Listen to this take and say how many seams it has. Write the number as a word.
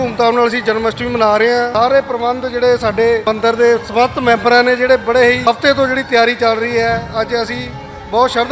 three